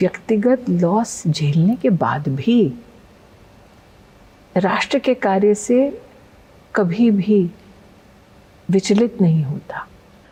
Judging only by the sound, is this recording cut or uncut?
uncut